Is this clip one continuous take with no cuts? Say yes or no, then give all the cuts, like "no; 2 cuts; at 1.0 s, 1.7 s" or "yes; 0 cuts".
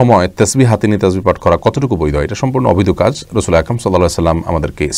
yes; 0 cuts